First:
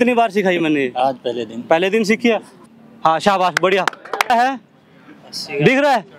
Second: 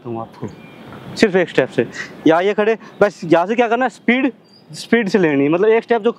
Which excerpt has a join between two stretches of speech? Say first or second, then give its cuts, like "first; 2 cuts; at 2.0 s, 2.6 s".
first; 2 cuts; at 2.5 s, 4.3 s